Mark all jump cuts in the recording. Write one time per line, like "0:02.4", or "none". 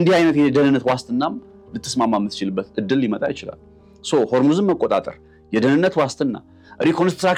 none

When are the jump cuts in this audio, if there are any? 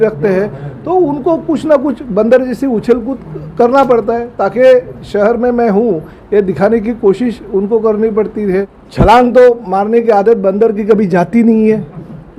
0:08.8

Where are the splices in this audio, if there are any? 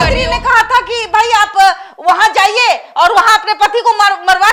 none

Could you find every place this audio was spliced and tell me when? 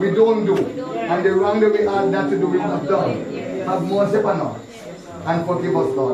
0:04.1

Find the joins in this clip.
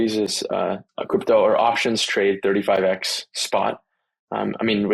0:00.9

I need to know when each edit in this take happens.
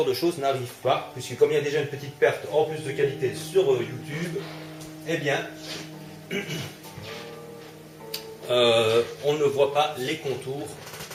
none

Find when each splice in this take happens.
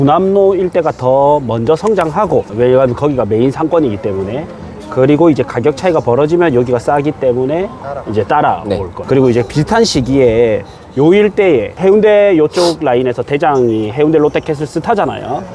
0:02.5
0:08.9
0:11.7

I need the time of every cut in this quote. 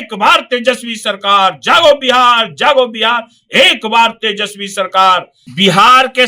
0:05.4

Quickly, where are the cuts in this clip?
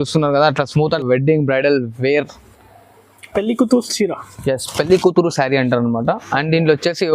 0:01.0

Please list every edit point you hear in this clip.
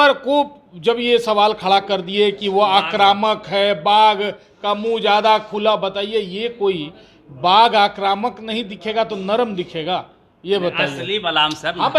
none

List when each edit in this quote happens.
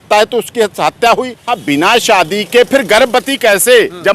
0:01.4

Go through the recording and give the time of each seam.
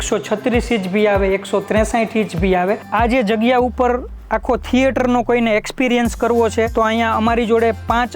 0:02.8
0:06.7

